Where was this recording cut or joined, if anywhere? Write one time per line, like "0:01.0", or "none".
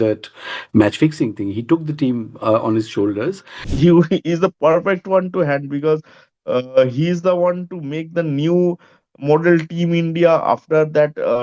0:03.7